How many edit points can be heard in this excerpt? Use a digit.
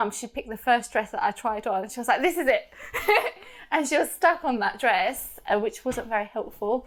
0